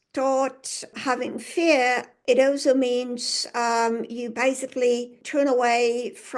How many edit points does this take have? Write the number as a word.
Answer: three